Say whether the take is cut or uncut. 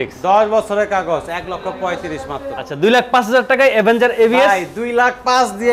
cut